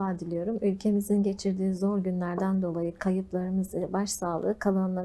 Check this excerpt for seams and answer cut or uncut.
uncut